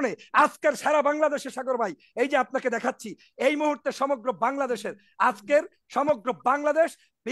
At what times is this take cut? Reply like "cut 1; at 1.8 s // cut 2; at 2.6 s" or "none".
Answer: none